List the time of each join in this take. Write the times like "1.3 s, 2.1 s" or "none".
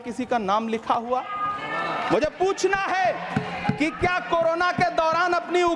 none